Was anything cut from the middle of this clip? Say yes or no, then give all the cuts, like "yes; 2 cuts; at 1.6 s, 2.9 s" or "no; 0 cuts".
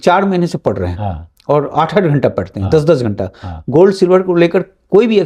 no; 0 cuts